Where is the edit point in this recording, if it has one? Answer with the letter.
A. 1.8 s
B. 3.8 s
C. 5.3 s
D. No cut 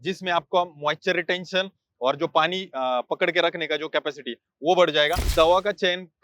C